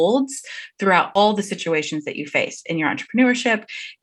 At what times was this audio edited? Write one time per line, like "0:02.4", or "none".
0:01.1